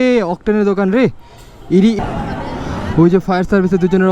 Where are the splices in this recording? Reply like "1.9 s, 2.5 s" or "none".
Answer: 2.0 s

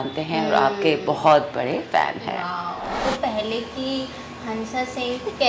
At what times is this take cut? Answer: 3.0 s

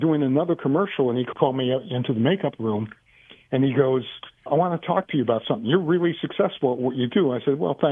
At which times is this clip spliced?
1.3 s

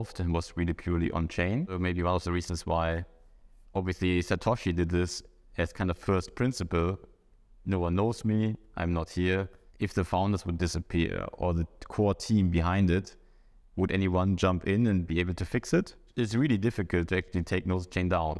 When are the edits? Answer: 1.8 s, 9.6 s, 16.0 s

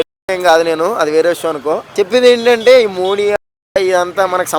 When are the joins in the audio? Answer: 1.9 s

